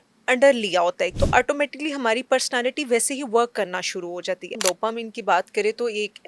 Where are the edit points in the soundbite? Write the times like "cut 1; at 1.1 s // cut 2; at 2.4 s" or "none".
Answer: cut 1; at 1.1 s // cut 2; at 4.6 s